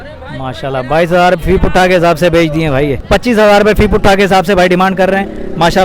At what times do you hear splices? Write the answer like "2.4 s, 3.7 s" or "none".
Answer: 3.0 s